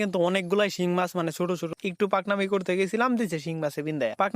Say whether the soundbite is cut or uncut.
cut